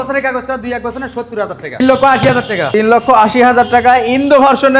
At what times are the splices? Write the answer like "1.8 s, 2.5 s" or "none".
1.8 s, 2.6 s